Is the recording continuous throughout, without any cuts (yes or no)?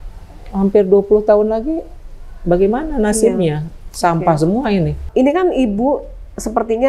no